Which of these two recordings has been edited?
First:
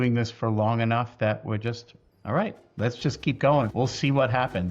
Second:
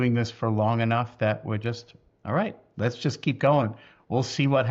first; 1 cut; at 3.7 s

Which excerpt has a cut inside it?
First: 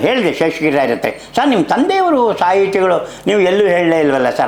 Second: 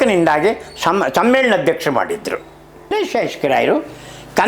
second; 1 cut; at 2.9 s

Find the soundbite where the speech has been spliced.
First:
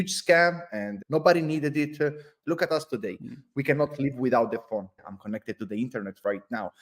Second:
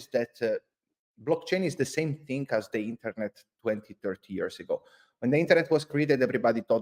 first; 3 cuts; at 0.9 s, 2.3 s, 5.0 s

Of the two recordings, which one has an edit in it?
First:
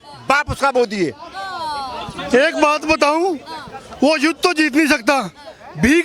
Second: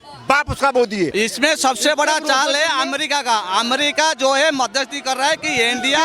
second; 1 cut; at 1.1 s

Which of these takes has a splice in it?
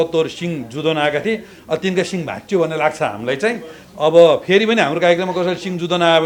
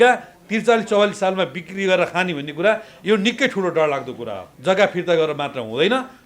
second; 1 cut; at 4.5 s

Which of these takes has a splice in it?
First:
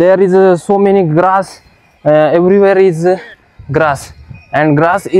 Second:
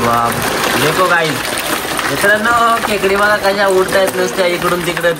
second; 1 cut; at 1.4 s

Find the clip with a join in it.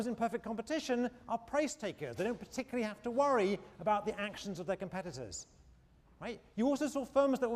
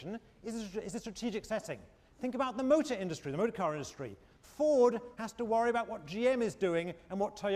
first; 1 cut; at 5.8 s

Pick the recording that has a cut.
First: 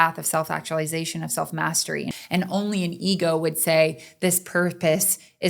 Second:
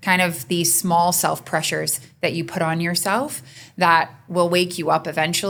first; 1 cut; at 2.1 s

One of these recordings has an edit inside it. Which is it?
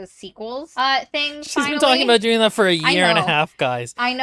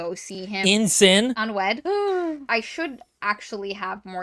second; 2 cuts; at 1.4 s, 2.4 s

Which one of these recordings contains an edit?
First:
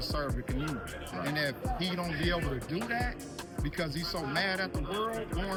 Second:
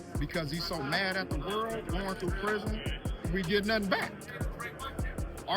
second; 1 cut; at 3.3 s

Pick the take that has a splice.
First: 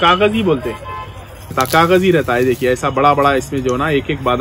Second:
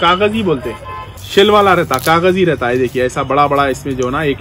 first; 1 cut; at 1.4 s

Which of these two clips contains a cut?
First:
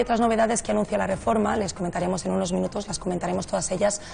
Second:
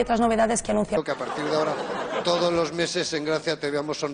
first; 1 cut; at 1.0 s

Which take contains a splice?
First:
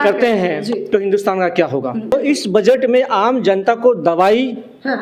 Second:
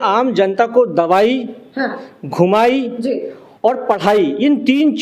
first; 1 cut; at 2.1 s

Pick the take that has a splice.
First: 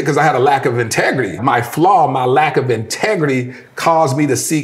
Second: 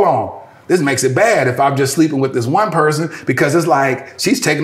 first; 1 cut; at 1.4 s

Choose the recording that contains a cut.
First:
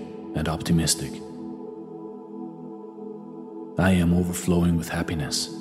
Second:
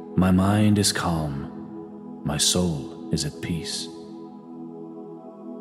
first; 2 cuts; at 1.3 s, 3.5 s

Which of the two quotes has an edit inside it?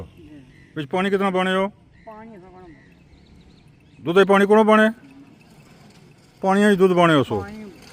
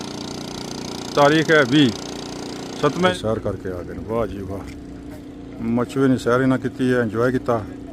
second; 1 cut; at 3.1 s

